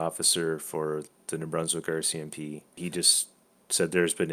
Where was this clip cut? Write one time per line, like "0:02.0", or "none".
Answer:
0:01.1
0:02.7